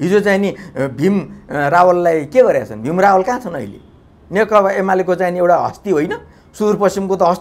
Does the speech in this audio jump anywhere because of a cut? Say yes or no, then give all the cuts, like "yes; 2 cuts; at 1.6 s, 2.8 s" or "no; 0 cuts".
no; 0 cuts